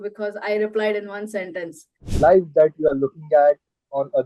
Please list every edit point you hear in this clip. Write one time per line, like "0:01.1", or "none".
0:02.1